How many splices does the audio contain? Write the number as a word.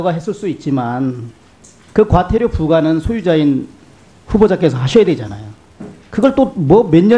one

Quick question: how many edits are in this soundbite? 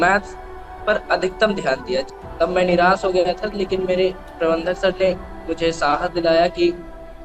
one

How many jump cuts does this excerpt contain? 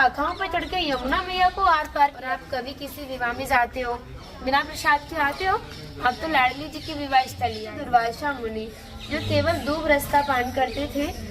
two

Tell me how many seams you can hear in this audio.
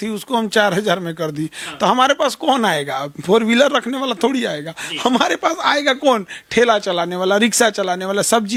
zero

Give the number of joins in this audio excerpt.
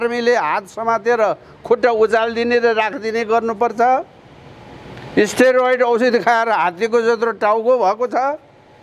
zero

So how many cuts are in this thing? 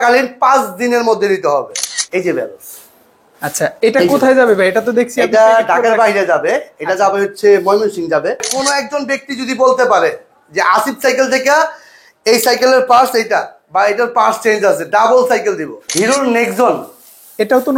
three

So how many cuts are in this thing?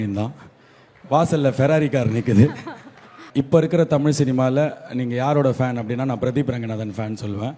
one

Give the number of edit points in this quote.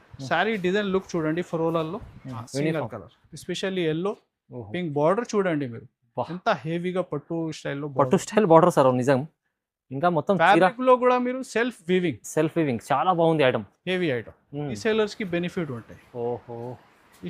two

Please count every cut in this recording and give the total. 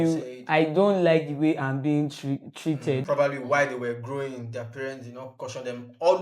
one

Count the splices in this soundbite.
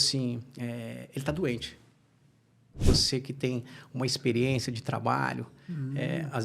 one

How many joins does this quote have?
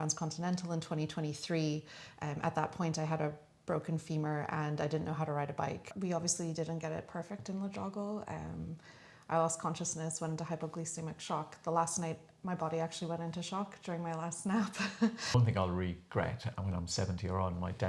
two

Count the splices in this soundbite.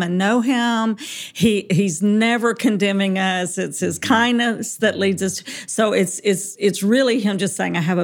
zero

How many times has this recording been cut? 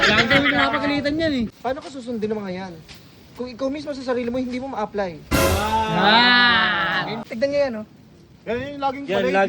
two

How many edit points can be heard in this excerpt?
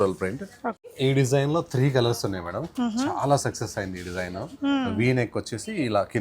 one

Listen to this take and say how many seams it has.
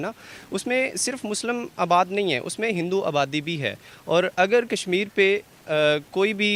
zero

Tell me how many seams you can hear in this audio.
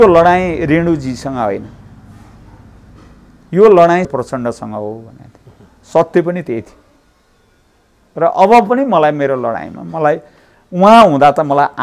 one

